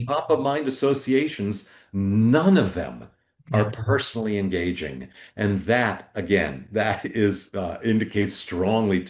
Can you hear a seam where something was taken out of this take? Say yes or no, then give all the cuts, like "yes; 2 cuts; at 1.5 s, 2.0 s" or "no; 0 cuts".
no; 0 cuts